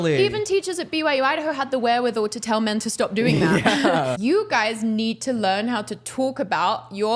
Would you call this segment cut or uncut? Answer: cut